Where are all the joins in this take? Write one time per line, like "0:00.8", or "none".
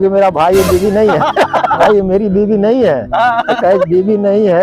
0:01.8